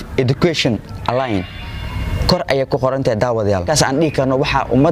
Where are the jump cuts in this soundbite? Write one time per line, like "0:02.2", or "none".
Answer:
0:03.6